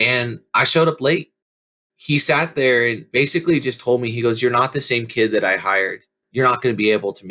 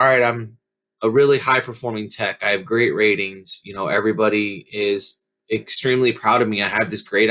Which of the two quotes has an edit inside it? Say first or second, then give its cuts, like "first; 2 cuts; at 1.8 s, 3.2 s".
first; 3 cuts; at 1.4 s, 3.0 s, 6.2 s